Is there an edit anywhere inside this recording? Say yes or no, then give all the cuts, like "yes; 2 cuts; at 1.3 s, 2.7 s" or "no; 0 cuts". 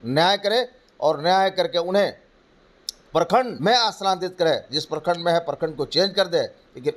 yes; 1 cut; at 3.5 s